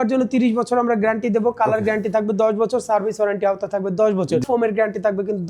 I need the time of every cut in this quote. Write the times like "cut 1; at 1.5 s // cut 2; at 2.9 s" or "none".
cut 1; at 4.4 s